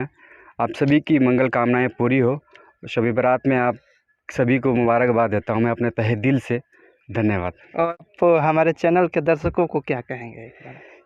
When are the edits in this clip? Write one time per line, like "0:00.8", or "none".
0:08.0

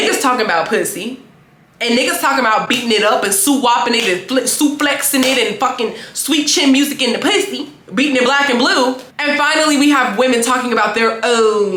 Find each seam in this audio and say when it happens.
none

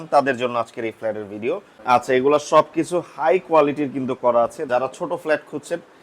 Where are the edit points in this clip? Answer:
0:01.7
0:04.6

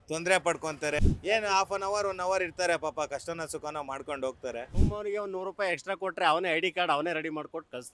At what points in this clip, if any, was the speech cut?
0:01.0
0:04.8

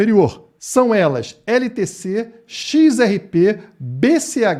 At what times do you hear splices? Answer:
none

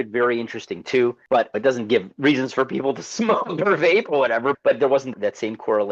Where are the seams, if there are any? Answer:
0:01.2
0:04.6

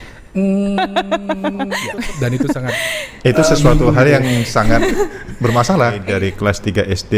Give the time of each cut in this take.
0:01.8
0:06.1

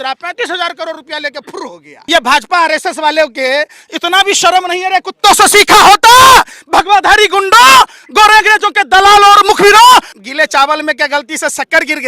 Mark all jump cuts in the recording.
0:01.9
0:10.2

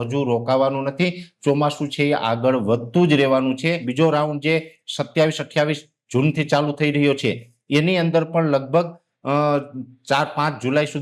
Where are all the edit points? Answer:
0:03.9

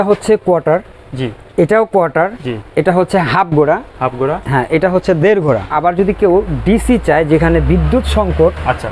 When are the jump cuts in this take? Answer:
0:05.7

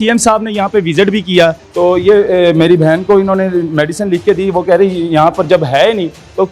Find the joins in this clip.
0:01.6

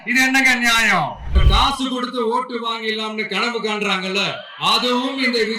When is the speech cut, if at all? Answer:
0:01.4

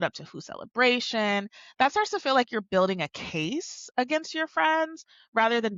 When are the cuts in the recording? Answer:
none

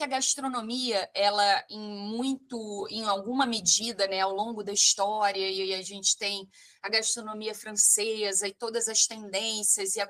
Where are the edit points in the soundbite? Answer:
none

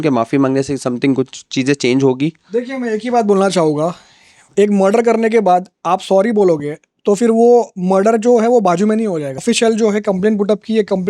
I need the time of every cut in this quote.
0:09.4

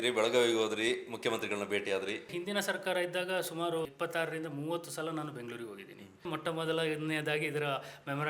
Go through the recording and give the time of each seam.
0:02.3
0:03.9
0:06.3

